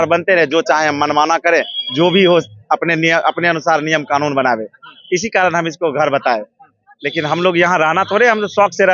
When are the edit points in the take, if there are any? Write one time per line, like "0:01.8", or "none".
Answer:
none

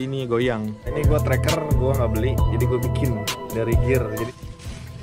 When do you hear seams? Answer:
0:00.9
0:04.3

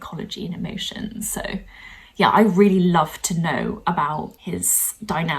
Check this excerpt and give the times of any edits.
0:04.4

